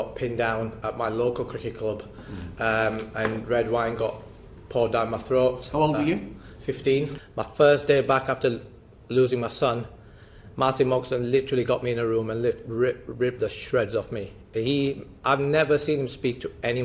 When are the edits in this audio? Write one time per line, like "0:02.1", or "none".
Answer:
0:07.2